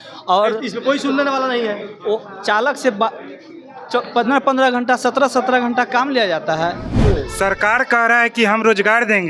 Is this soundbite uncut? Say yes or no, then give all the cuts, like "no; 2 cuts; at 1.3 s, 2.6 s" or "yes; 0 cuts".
no; 1 cut; at 7.0 s